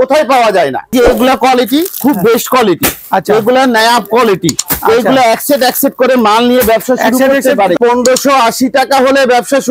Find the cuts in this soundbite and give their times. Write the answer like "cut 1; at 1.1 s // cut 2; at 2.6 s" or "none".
cut 1; at 0.9 s // cut 2; at 7.8 s